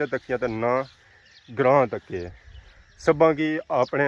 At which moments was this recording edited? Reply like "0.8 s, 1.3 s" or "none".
none